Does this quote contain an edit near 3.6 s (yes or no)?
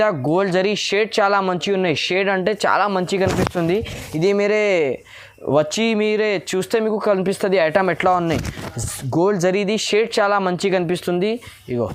no